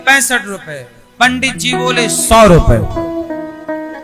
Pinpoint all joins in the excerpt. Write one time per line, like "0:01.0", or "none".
none

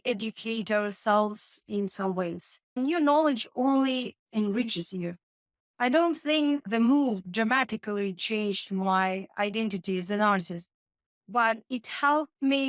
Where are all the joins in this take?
0:02.7

